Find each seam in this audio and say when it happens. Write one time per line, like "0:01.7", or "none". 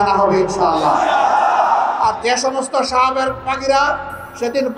none